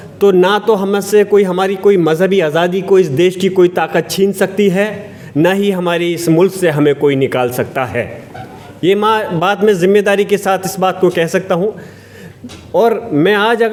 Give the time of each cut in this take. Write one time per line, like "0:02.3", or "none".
none